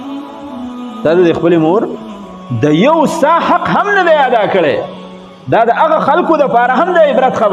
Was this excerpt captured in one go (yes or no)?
no